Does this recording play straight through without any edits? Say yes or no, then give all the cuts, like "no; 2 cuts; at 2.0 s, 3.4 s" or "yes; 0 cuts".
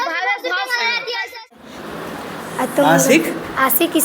no; 1 cut; at 1.6 s